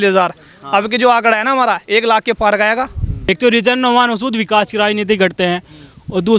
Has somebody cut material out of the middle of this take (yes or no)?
yes